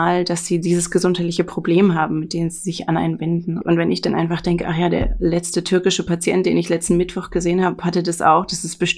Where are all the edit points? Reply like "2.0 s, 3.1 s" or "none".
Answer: 3.5 s